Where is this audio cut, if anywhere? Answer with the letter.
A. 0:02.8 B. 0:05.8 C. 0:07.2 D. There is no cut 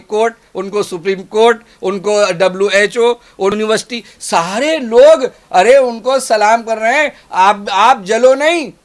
D